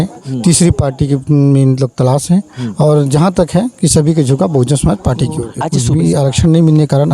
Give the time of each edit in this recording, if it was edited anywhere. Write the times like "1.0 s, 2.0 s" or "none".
5.6 s